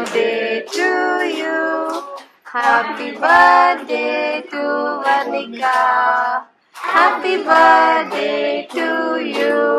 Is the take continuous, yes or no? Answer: yes